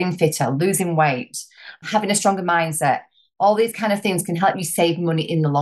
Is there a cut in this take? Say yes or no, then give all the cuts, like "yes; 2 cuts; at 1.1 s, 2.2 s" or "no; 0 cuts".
yes; 2 cuts; at 1.8 s, 4.6 s